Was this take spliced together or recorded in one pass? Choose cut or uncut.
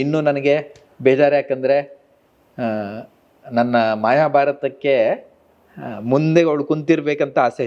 uncut